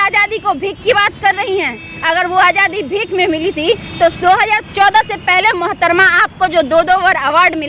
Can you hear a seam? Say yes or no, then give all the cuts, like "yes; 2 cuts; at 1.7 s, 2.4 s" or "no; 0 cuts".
no; 0 cuts